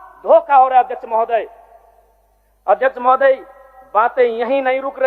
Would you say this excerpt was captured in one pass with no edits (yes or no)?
yes